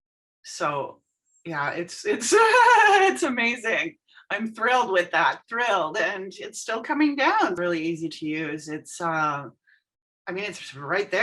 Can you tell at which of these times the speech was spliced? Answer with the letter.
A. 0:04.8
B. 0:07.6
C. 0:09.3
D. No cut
B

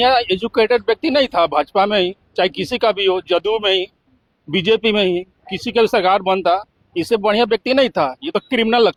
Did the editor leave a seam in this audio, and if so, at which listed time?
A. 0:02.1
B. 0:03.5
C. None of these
C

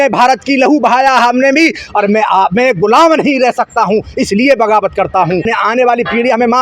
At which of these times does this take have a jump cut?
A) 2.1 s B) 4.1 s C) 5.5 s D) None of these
C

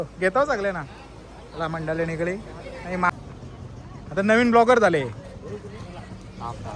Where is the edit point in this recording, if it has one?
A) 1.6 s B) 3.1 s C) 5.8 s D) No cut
B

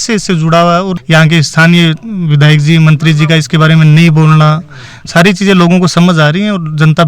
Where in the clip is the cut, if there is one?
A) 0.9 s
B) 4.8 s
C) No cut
A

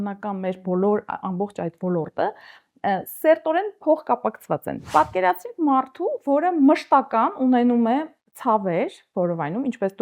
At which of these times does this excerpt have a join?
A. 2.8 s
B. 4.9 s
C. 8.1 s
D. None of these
B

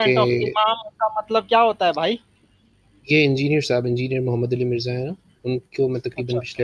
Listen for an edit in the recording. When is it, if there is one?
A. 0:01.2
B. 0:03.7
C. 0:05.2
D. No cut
D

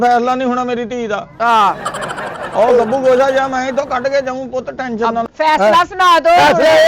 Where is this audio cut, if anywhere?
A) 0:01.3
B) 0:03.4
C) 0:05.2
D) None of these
C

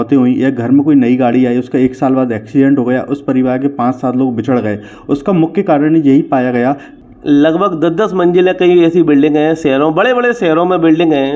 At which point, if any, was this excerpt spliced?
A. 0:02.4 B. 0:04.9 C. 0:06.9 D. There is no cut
C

